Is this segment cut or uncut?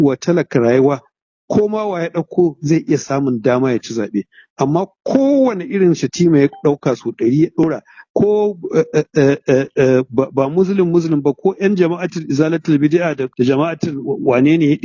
cut